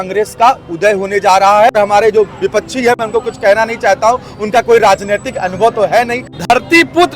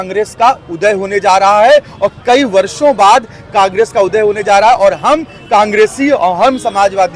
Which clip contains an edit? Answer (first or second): first